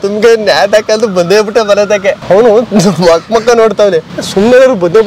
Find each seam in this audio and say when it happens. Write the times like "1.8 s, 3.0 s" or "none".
2.2 s, 4.2 s